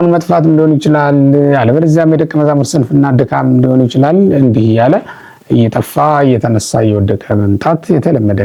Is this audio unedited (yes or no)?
yes